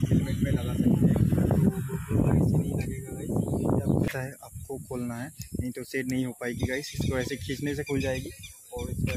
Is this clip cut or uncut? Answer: cut